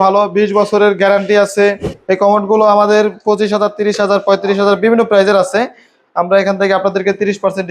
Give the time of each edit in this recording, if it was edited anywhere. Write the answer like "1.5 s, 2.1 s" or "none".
1.9 s